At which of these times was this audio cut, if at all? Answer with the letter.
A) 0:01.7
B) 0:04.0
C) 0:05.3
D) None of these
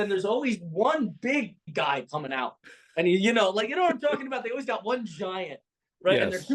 A